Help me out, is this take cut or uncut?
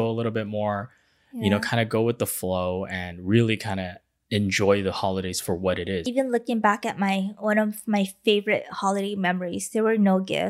cut